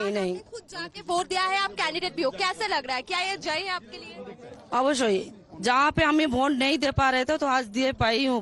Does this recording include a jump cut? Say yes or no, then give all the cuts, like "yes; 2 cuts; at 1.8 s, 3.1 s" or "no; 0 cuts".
no; 0 cuts